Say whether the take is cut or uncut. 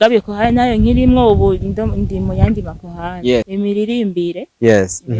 cut